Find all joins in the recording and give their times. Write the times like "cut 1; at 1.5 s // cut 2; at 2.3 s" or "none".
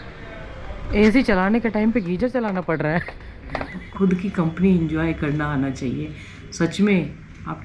cut 1; at 3.7 s